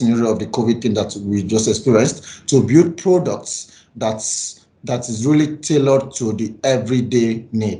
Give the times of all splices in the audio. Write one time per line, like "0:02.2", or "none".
none